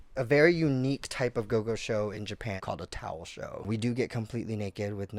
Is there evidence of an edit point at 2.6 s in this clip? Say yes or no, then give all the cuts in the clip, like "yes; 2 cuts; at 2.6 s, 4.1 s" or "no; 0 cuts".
yes; 2 cuts; at 2.6 s, 3.6 s